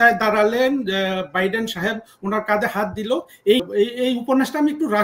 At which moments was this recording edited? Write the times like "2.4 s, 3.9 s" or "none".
3.6 s

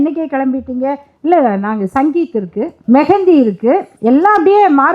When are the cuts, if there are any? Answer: 2.8 s, 3.9 s

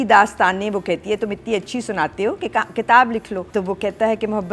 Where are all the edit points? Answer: 3.4 s

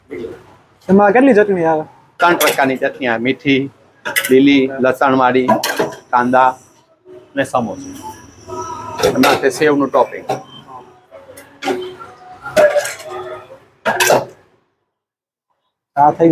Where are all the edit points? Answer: none

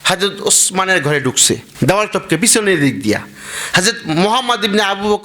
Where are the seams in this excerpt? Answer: 1.7 s

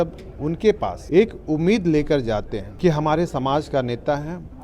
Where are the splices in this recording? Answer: 0.9 s, 2.6 s

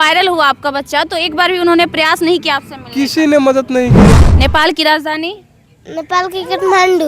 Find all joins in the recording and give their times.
4.1 s

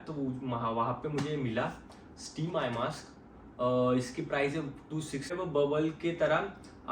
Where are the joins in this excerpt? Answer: 5.3 s

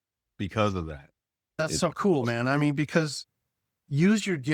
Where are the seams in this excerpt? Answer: 1.6 s

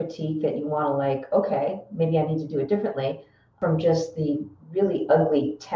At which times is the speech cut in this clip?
3.6 s, 4.5 s

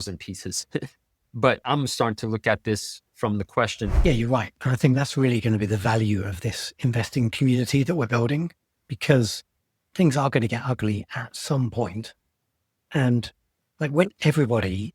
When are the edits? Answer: 3.9 s

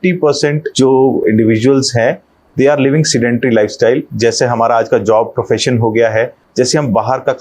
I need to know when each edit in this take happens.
1.2 s, 4.1 s, 6.4 s

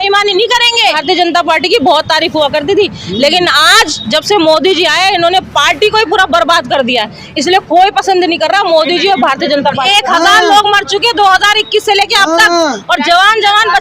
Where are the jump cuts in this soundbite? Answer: 0.9 s, 9.8 s

